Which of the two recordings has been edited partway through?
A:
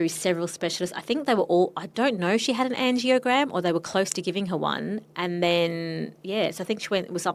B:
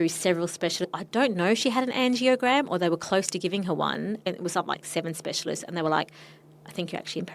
B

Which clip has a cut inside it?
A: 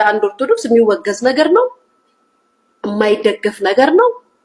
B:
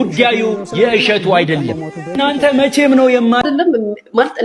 B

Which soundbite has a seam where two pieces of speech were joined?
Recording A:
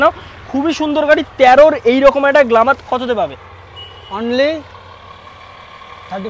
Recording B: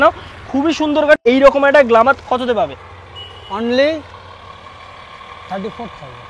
B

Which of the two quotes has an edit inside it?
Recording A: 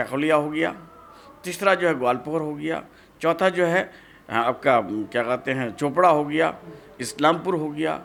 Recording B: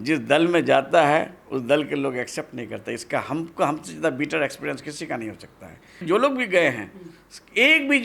B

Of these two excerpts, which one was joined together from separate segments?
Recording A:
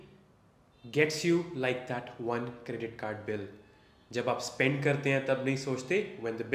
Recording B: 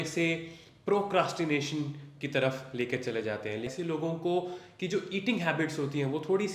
B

